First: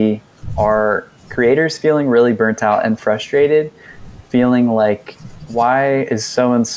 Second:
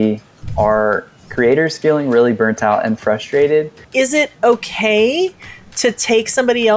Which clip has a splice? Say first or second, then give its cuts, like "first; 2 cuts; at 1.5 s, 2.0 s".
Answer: second; 1 cut; at 3.8 s